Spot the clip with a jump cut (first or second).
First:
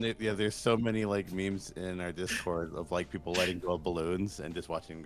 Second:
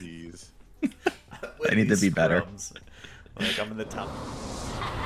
second